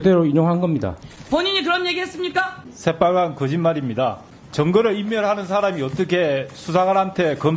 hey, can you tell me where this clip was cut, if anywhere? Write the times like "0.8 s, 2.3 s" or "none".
2.7 s, 4.3 s